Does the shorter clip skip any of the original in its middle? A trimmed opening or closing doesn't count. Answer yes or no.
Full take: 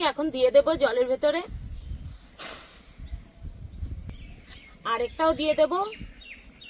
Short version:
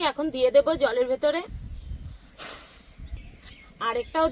yes